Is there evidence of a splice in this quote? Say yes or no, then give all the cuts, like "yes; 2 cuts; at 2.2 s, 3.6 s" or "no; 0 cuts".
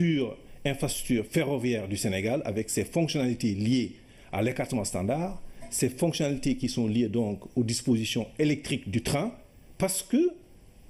no; 0 cuts